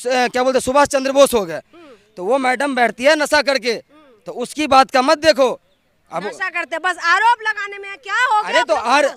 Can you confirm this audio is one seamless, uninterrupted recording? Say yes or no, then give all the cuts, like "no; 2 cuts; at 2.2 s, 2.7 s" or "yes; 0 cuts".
yes; 0 cuts